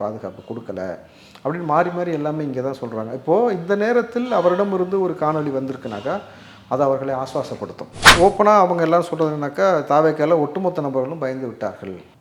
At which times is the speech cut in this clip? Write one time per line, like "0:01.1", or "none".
0:08.0